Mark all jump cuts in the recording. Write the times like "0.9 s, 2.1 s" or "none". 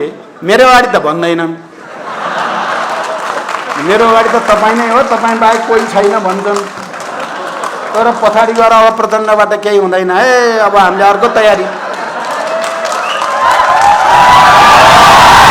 none